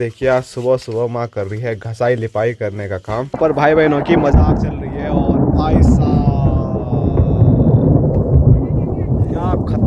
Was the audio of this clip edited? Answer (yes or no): yes